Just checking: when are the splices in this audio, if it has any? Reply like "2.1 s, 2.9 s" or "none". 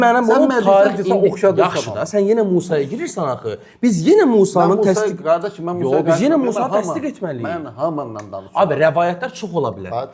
none